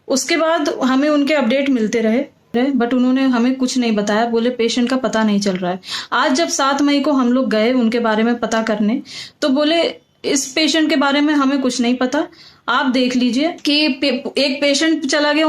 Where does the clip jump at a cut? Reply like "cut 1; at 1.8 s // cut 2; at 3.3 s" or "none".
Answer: cut 1; at 2.5 s // cut 2; at 13.6 s